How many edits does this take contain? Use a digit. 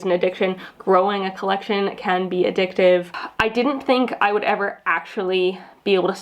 1